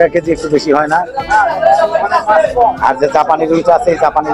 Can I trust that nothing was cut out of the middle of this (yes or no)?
yes